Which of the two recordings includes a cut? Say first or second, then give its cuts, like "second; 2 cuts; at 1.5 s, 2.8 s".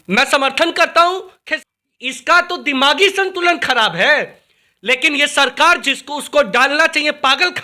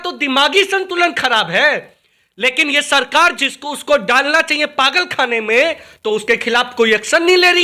first; 1 cut; at 1.4 s